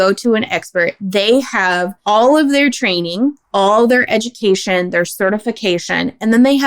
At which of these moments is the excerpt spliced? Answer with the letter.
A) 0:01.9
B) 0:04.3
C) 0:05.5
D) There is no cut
A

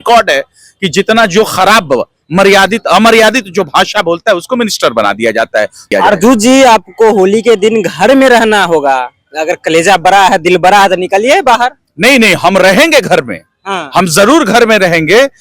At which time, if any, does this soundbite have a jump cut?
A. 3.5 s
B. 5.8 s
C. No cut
B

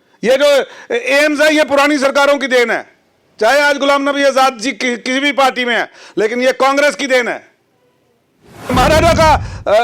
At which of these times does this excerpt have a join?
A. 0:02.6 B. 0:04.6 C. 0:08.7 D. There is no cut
C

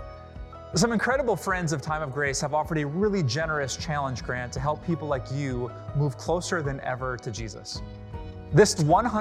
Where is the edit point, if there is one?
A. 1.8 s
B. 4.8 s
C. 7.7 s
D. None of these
B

